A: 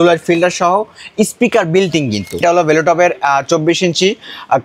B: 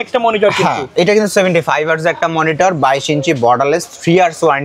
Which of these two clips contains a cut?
A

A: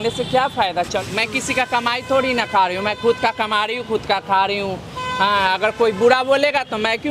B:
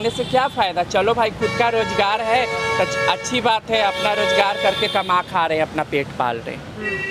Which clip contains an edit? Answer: A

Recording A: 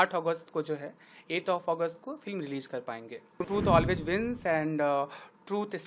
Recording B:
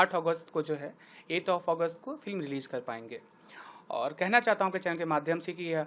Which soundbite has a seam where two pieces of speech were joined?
A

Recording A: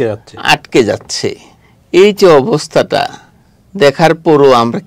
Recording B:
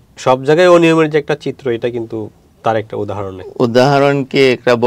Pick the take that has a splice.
B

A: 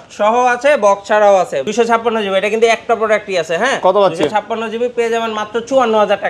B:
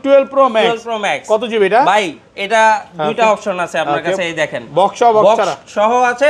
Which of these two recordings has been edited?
A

